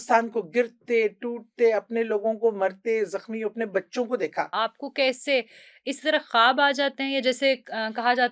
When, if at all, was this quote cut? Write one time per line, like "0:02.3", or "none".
0:04.5